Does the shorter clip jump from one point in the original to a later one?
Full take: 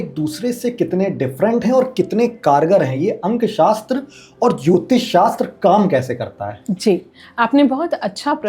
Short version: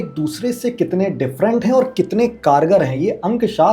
no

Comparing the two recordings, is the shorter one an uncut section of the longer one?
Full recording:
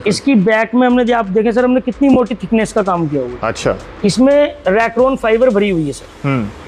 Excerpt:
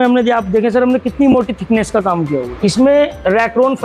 no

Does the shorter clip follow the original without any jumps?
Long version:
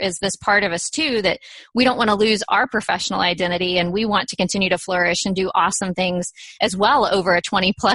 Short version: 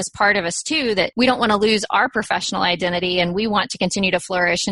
no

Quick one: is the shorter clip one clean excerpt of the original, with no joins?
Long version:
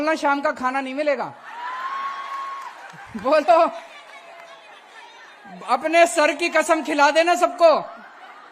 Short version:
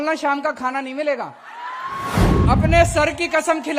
no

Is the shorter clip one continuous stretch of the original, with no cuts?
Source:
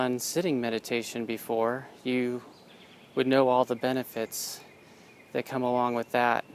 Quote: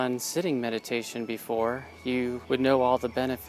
no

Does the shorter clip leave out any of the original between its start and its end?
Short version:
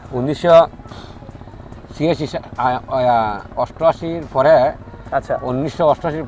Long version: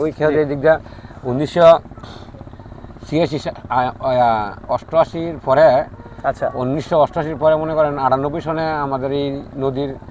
no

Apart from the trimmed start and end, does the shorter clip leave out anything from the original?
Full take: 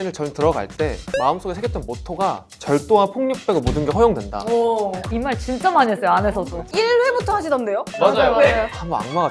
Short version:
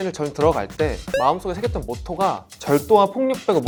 no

